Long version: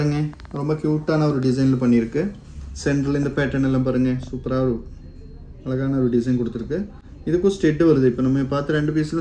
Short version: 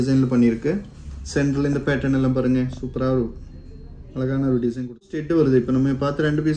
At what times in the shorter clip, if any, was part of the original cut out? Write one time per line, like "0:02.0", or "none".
0:05.1